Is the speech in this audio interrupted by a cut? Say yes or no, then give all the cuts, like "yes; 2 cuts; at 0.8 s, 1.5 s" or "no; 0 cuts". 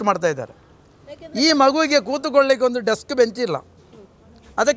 no; 0 cuts